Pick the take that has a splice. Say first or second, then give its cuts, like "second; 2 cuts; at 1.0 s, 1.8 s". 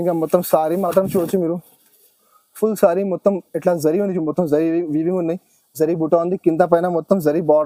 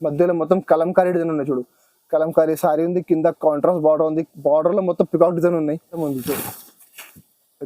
second; 1 cut; at 6.0 s